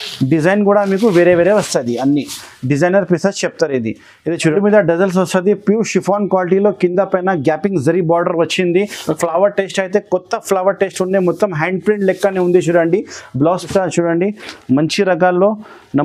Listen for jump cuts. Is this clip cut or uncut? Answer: cut